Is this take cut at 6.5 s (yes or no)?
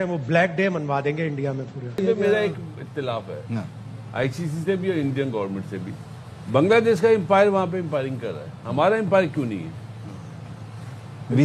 no